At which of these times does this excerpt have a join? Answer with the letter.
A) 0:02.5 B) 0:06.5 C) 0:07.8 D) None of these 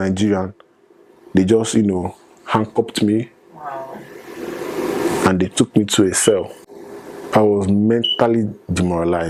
D